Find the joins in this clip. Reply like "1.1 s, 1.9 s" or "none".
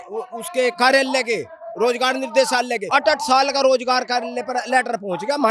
2.8 s